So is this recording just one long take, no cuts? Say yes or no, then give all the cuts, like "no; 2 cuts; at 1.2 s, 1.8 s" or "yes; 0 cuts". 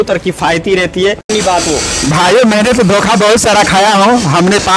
no; 1 cut; at 1.3 s